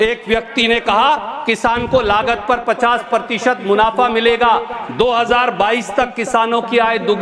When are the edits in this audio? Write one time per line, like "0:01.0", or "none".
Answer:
none